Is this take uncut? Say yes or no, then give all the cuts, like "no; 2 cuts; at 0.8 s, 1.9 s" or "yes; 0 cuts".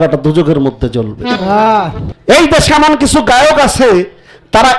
no; 1 cut; at 2.1 s